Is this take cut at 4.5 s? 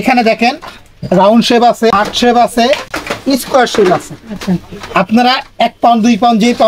no; 1 cut; at 1.9 s

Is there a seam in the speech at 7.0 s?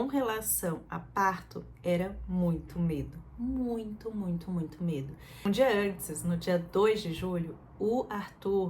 no; 1 cut; at 5.4 s

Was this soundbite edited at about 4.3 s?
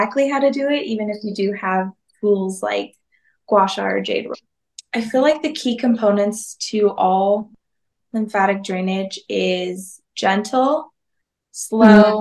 yes; 1 cut; at 4.3 s

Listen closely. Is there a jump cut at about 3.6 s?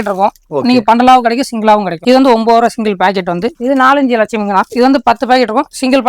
yes; 2 cuts; at 1.9 s, 3.6 s

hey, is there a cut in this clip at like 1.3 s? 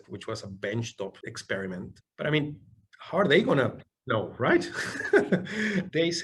yes; 2 cuts; at 1.3 s, 2.0 s

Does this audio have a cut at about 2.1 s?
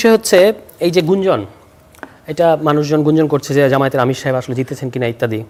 no; 0 cuts

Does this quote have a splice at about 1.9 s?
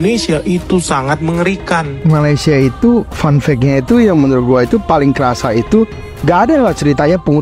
yes; 2 cuts; at 1.9 s, 6.0 s

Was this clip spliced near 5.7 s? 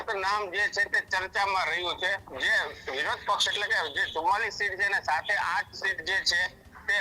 no; 1 cut; at 2.3 s

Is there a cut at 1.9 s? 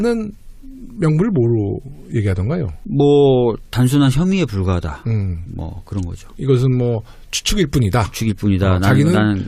no; 1 cut; at 5.2 s

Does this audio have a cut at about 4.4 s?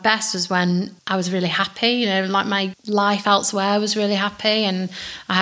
no; 2 cuts; at 1.0 s, 2.7 s

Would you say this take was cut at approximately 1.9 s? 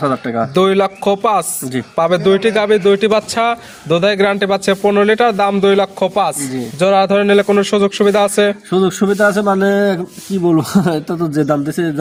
no; 0 cuts

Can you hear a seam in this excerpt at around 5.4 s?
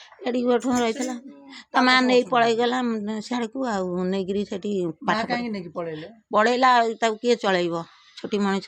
yes; 1 cut; at 5.4 s

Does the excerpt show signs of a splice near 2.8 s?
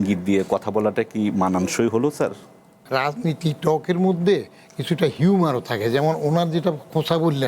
yes; 1 cut; at 2.8 s

